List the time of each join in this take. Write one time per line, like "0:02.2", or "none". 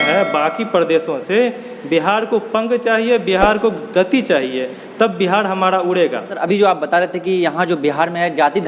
0:06.2